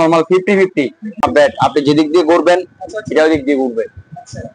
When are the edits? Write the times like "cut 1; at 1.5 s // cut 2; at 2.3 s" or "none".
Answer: cut 1; at 1.2 s